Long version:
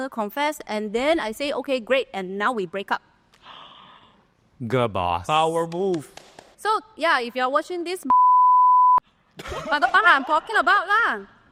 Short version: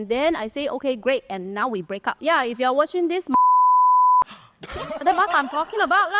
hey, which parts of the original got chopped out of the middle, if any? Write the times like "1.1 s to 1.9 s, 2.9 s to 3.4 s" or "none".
3.0 s to 6.9 s